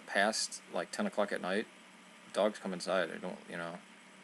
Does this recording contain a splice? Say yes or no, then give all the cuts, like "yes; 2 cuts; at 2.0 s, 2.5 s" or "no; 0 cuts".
yes; 1 cut; at 2.6 s